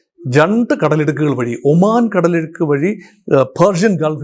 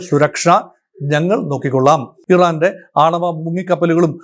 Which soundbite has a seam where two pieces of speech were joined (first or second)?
second